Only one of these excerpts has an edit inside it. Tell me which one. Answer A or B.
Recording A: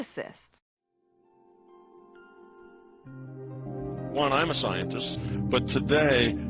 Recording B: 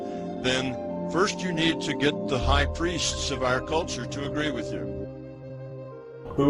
A